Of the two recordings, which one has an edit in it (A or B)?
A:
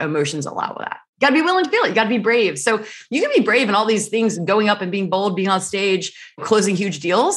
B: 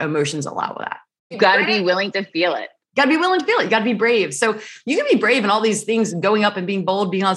A